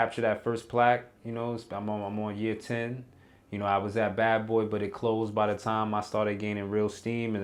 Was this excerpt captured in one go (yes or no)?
yes